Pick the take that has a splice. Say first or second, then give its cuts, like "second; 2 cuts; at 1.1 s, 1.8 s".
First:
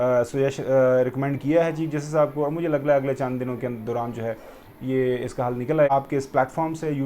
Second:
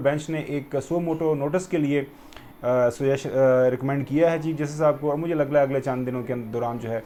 first; 1 cut; at 5.9 s